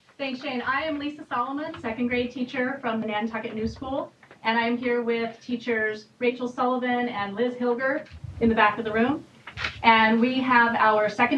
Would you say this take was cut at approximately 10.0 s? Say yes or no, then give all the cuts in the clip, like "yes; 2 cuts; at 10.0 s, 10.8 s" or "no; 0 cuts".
no; 1 cut; at 6.1 s